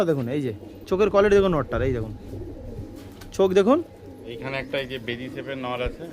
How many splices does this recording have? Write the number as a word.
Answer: one